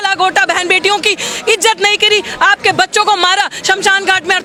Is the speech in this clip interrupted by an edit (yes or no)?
no